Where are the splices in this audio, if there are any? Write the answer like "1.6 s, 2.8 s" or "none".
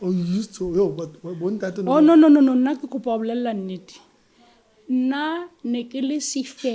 none